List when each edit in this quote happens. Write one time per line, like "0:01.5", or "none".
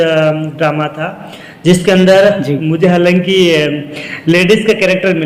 none